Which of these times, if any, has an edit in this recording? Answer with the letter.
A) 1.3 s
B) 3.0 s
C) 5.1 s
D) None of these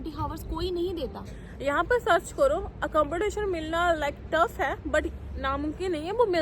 A